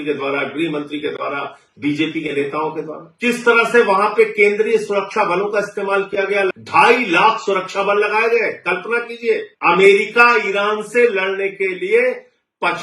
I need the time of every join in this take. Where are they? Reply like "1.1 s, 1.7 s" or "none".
2.5 s, 6.6 s, 9.5 s